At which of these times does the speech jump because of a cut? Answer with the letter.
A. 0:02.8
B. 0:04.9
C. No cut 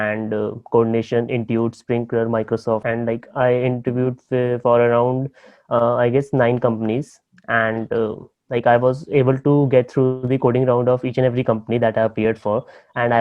A